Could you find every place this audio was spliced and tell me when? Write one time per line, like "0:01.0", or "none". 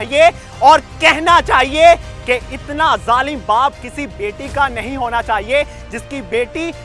none